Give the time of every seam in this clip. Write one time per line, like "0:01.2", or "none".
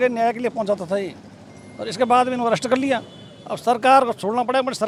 none